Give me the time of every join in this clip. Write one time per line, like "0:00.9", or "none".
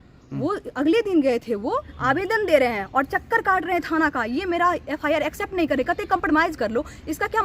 0:01.9